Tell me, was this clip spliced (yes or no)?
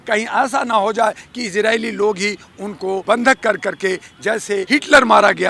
yes